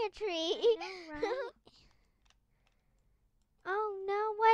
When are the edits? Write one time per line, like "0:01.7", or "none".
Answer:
0:01.4